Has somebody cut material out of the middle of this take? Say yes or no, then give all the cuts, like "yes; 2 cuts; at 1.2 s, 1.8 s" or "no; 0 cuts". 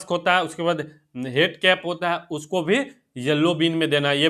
no; 0 cuts